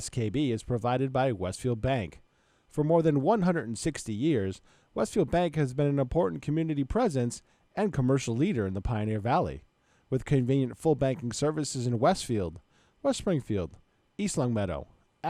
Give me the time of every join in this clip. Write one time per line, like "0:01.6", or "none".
none